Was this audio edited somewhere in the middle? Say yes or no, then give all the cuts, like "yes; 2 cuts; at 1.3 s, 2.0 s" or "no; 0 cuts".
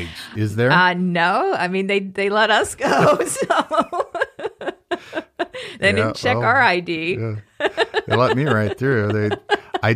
no; 0 cuts